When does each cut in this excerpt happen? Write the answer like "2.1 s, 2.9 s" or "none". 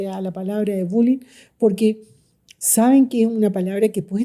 none